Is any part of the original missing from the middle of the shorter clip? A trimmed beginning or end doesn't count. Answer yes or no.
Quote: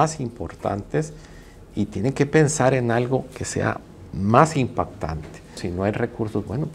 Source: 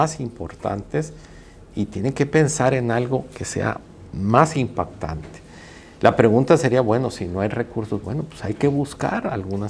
yes